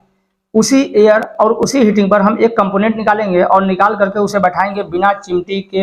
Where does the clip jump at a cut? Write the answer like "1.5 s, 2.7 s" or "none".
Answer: none